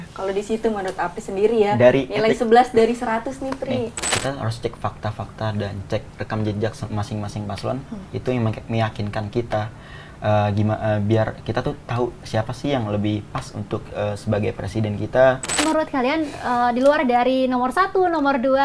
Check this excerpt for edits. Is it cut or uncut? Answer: cut